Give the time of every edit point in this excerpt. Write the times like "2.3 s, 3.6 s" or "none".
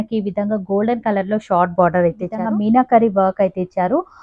2.4 s